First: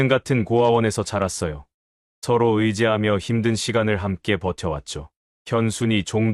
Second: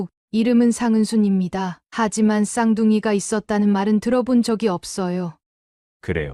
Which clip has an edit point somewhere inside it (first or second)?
second